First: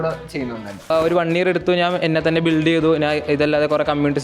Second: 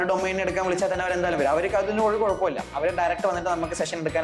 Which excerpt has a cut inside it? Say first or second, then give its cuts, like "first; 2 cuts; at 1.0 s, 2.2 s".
first; 1 cut; at 0.9 s